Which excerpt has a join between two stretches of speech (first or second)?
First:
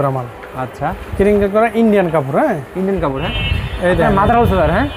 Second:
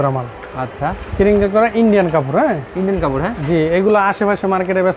first